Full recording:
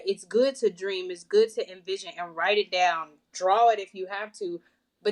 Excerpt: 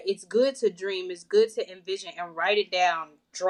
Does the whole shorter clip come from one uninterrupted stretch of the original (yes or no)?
yes